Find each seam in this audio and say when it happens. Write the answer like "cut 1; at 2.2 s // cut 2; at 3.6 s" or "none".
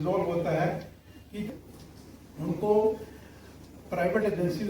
cut 1; at 1.5 s

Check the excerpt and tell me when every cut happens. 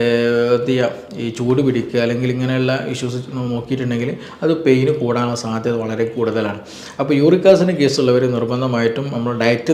none

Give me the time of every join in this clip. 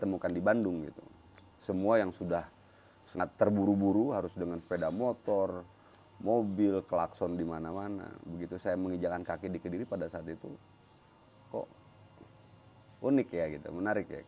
cut 1; at 3.2 s

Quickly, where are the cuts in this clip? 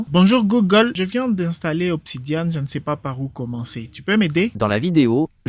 cut 1; at 0.9 s // cut 2; at 4.5 s

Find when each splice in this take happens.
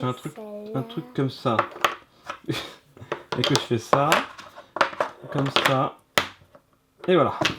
none

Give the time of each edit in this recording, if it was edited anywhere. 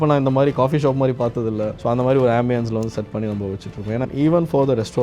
cut 1; at 4.1 s

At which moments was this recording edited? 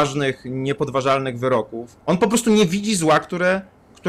cut 1; at 1.9 s

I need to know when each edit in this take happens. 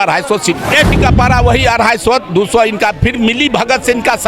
cut 1; at 1.0 s

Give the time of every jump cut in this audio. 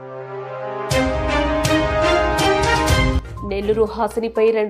none

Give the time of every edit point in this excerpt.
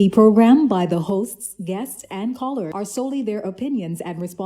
cut 1; at 2.7 s

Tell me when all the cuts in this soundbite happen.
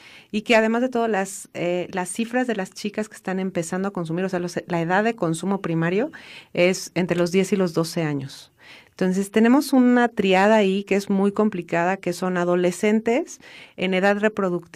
none

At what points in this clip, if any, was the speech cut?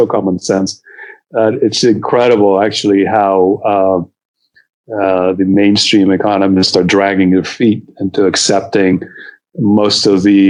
none

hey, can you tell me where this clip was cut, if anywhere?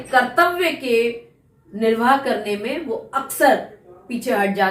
none

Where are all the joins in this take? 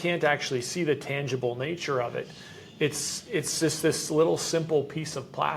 none

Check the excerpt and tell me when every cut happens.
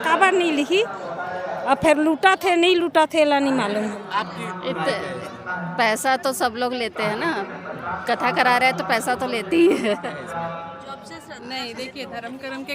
cut 1; at 4.0 s // cut 2; at 10.0 s

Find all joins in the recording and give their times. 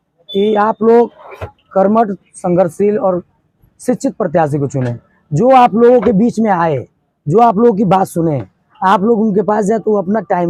none

